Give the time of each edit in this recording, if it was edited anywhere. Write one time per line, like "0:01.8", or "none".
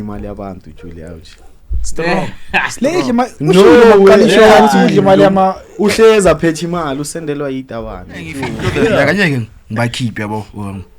0:08.6